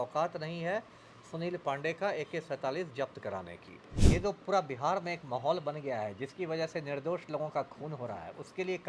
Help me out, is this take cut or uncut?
cut